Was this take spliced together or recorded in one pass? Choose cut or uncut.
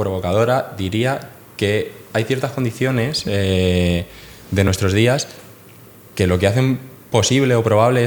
uncut